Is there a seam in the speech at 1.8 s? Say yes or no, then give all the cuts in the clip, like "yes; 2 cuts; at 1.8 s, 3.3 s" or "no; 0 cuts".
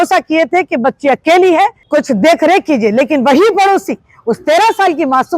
yes; 1 cut; at 1.8 s